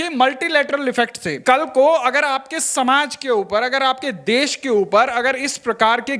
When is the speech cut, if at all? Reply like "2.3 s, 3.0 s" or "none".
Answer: 1.4 s